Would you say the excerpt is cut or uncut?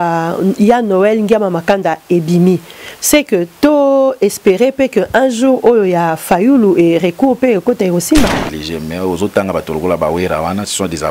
cut